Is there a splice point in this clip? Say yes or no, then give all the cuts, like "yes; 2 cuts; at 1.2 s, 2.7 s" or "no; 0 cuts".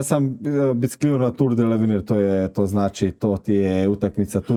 no; 0 cuts